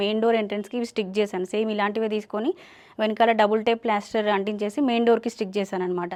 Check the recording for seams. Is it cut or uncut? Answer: uncut